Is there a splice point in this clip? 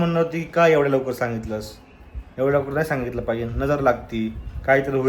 no; 0 cuts

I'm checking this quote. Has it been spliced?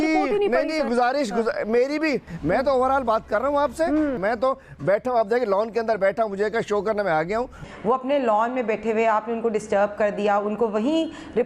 yes; 3 cuts; at 2.3 s, 4.2 s, 7.6 s

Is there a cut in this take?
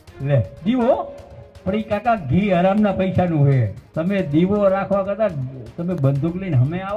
yes; 1 cut; at 3.8 s

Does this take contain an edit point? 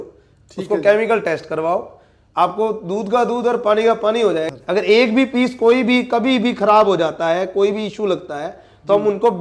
yes; 1 cut; at 4.5 s

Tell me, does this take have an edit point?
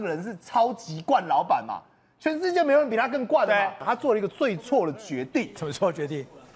yes; 1 cut; at 3.8 s

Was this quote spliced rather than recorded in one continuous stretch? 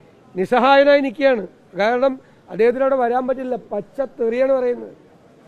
no; 0 cuts

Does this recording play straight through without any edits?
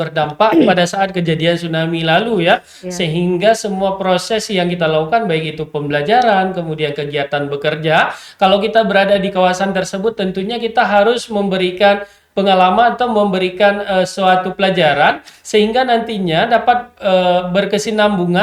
yes; 0 cuts

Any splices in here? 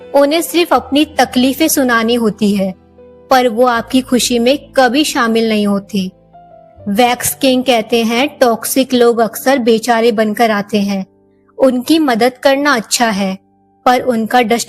no; 0 cuts

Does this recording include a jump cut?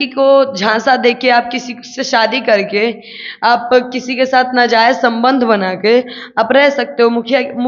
no; 0 cuts

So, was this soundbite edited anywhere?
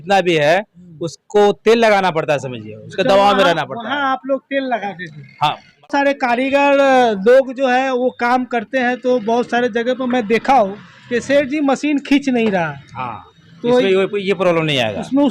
yes; 1 cut; at 5.8 s

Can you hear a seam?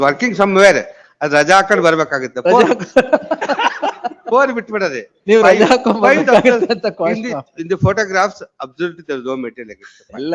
no; 0 cuts

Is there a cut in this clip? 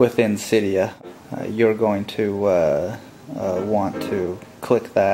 yes; 1 cut; at 0.9 s

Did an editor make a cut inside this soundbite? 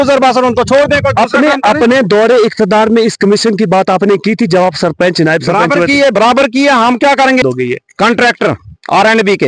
yes; 2 cuts; at 1.1 s, 7.4 s

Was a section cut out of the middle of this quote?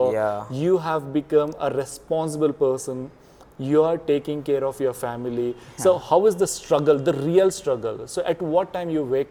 no; 0 cuts

